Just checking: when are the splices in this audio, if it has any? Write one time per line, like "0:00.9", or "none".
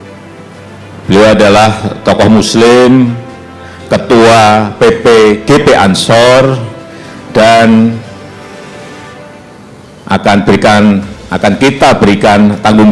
0:01.0